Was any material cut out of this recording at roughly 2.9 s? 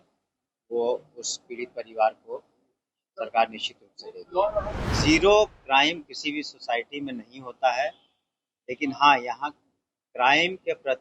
no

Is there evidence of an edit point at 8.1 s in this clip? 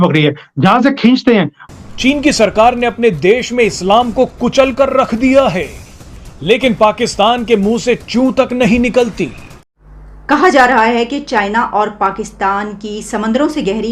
no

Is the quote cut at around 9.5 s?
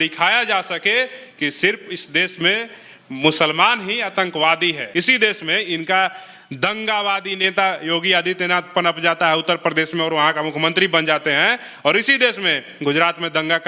no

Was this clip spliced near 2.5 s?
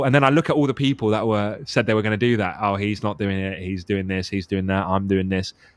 no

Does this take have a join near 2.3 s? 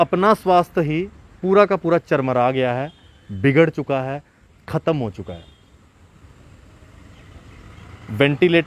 no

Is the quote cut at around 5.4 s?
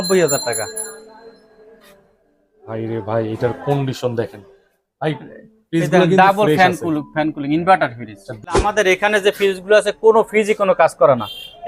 no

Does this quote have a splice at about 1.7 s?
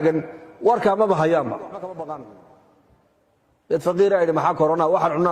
yes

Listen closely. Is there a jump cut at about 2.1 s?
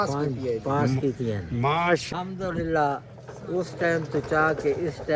yes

